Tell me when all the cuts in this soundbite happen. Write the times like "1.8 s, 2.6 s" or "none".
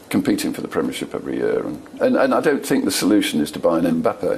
1.9 s